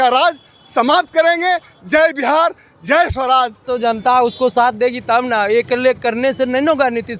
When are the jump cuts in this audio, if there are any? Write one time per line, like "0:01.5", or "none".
0:03.6